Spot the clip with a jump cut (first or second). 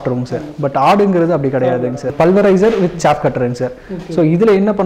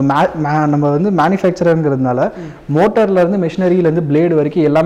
first